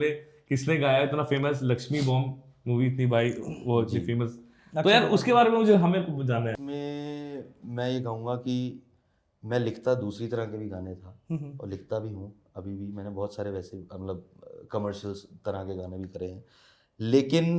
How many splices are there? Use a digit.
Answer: 1